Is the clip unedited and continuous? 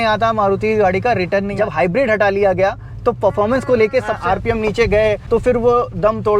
no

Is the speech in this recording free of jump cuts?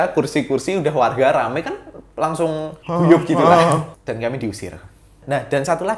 no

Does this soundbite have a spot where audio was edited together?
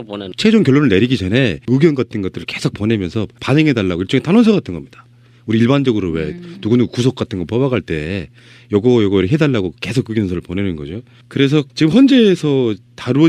yes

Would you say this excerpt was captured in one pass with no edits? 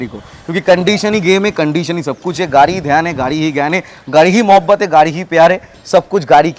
yes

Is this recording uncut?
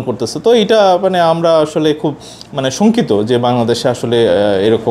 yes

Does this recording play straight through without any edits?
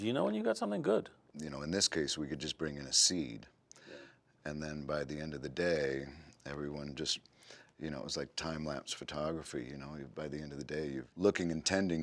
no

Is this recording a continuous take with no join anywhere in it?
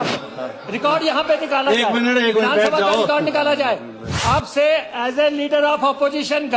no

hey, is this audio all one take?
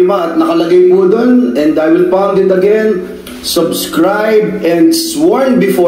yes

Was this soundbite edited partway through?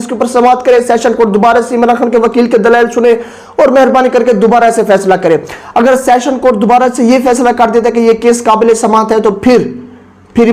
no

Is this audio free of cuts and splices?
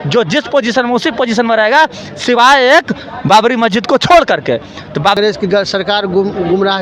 no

